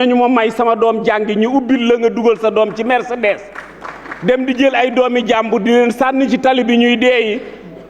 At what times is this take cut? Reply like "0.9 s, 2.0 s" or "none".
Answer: none